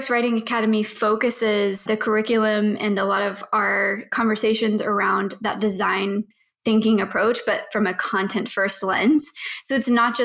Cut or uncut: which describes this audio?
cut